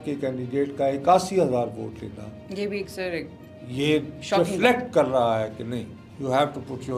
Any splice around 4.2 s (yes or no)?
no